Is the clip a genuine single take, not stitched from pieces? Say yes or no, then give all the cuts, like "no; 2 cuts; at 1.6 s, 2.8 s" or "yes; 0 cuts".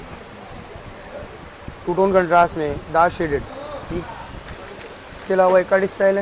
no; 1 cut; at 4.0 s